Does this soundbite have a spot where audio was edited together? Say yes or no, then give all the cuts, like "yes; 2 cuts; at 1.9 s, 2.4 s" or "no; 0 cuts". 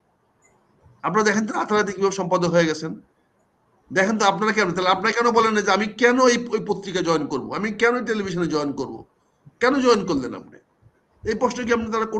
no; 0 cuts